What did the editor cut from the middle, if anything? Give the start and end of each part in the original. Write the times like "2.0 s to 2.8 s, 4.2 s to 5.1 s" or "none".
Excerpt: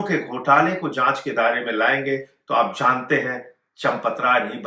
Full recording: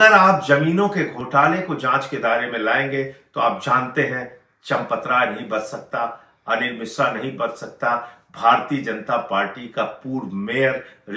none